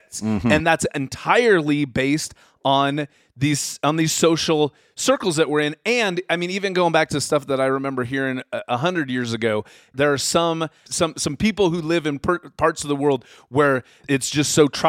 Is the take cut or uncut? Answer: cut